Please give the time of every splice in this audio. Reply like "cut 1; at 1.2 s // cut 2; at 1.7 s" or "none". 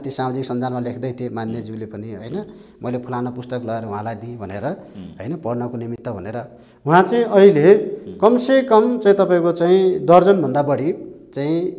none